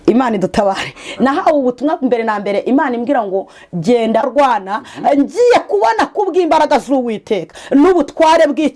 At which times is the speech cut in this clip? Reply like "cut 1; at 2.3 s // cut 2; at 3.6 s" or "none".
cut 1; at 4.3 s